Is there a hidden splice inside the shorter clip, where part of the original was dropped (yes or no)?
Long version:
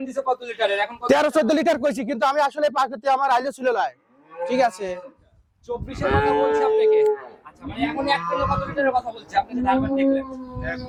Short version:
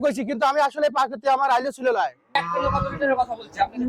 yes